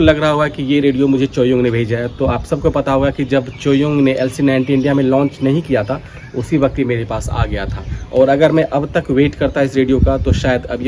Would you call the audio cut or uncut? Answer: uncut